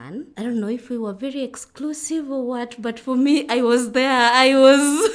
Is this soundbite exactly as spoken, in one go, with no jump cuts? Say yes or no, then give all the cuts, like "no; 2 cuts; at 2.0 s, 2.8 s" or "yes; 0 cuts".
yes; 0 cuts